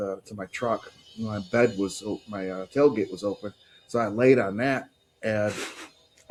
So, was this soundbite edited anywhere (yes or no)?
no